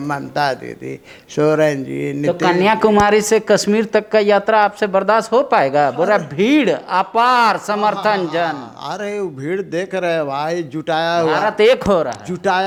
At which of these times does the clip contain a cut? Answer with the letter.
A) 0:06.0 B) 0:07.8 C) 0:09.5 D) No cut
D